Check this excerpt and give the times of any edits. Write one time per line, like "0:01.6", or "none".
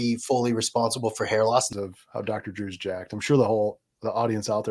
0:01.7